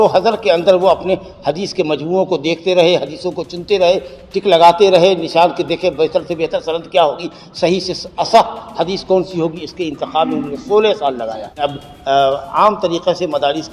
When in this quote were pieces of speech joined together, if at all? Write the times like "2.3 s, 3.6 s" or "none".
11.5 s